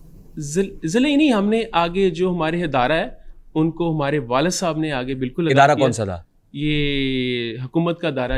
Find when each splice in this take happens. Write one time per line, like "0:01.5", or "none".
none